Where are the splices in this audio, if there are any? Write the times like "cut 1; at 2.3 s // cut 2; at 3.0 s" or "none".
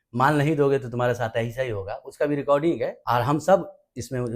cut 1; at 3.0 s